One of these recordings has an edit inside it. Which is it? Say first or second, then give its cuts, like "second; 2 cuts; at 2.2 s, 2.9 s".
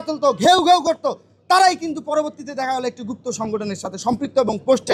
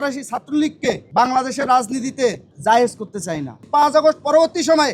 second; 3 cuts; at 1.0 s, 2.5 s, 3.6 s